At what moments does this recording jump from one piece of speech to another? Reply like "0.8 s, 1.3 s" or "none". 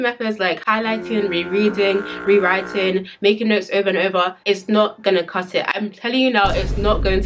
none